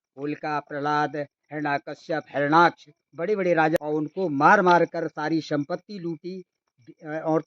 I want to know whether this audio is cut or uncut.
cut